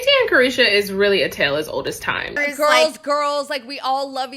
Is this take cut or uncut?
cut